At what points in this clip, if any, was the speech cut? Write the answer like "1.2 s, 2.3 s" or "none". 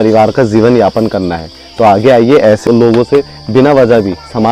2.7 s